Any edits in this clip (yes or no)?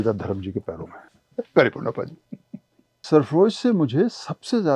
yes